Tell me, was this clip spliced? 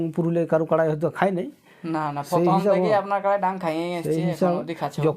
no; 0 cuts

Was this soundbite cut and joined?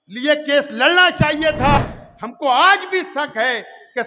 yes; 1 cut; at 1.8 s

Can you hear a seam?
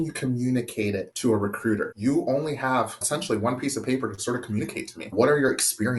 yes; 4 cuts; at 1.1 s, 1.9 s, 3.0 s, 5.1 s

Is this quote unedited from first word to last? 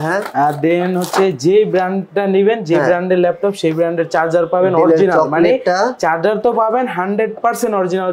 yes; 0 cuts

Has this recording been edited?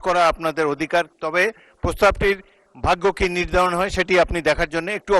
yes; 1 cut; at 1.1 s

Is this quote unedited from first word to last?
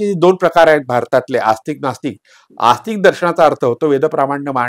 yes; 0 cuts

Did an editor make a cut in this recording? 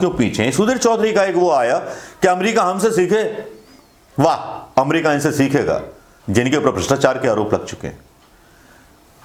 no; 0 cuts

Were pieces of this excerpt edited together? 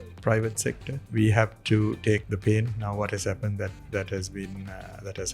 yes; 2 cuts; at 1.0 s, 2.3 s

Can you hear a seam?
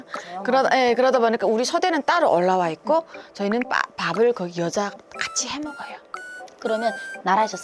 no; 0 cuts

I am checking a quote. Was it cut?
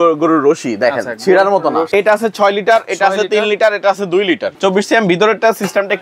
yes; 2 cuts; at 1.9 s, 4.5 s

